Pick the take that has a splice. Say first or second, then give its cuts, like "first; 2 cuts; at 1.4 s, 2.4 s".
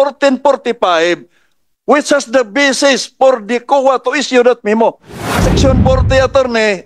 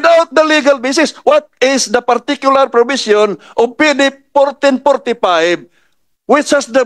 first; 1 cut; at 5.4 s